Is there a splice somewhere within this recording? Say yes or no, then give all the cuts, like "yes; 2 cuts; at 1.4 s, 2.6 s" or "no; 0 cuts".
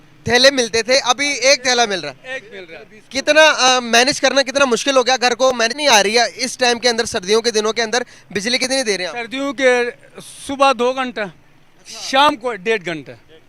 yes; 1 cut; at 5.7 s